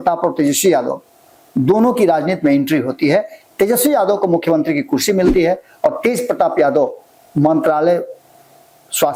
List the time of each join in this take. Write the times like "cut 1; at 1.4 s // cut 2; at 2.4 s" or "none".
none